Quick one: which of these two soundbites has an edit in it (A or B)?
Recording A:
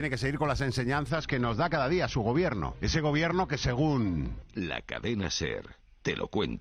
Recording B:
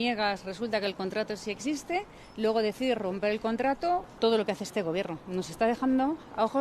B